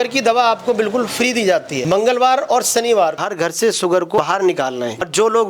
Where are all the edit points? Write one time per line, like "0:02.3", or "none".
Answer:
0:03.2